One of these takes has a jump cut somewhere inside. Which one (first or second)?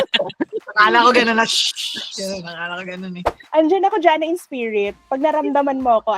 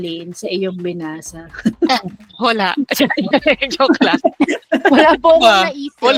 first